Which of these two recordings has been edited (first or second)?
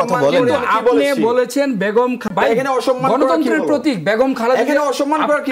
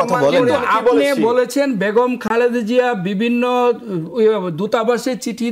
first